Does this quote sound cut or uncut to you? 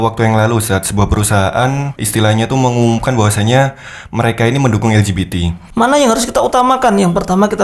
cut